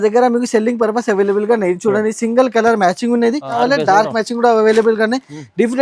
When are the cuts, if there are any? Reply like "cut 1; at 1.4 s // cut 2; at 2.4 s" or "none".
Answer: cut 1; at 3.5 s